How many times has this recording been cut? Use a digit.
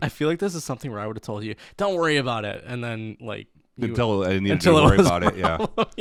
0